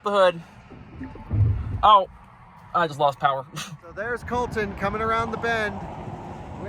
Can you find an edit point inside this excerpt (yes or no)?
yes